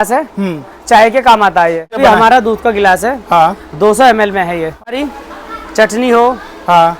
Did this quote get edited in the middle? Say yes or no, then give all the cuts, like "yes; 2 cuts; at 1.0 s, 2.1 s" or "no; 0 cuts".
yes; 2 cuts; at 2.0 s, 5.0 s